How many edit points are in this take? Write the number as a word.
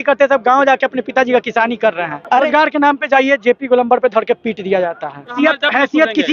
two